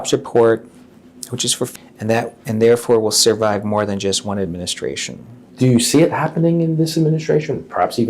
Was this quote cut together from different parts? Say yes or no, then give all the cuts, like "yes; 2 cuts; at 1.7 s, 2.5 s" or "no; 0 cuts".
yes; 1 cut; at 1.7 s